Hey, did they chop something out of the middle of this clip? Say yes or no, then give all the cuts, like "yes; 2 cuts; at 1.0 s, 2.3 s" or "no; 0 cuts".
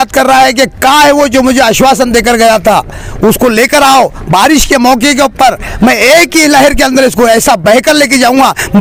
no; 0 cuts